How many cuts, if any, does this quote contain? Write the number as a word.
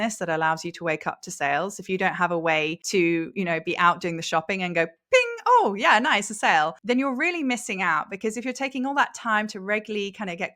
two